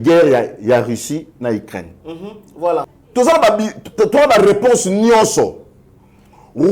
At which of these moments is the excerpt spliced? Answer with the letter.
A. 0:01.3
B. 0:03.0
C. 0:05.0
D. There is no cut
B